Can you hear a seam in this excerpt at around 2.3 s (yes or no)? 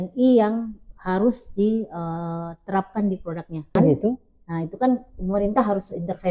no